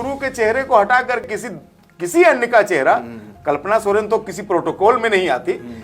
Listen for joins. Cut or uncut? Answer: cut